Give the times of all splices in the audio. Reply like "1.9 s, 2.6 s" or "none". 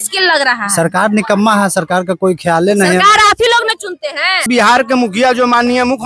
4.4 s